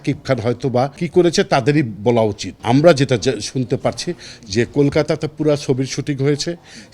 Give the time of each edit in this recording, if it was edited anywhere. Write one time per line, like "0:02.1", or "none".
0:01.0
0:02.5